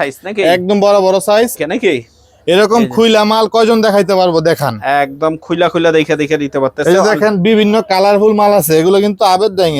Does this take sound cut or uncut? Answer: cut